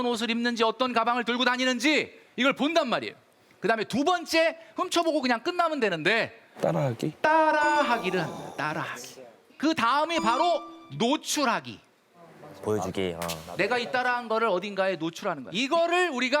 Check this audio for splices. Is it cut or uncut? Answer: cut